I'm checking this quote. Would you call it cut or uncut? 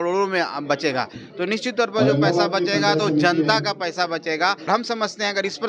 cut